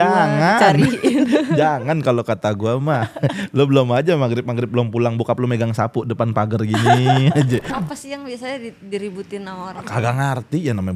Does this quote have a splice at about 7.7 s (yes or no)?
yes